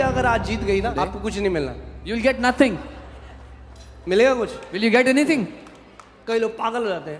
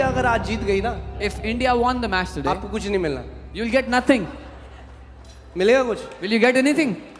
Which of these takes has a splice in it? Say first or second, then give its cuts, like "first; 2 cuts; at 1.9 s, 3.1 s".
first; 1 cut; at 0.9 s